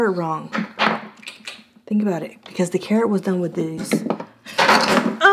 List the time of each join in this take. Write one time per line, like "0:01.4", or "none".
none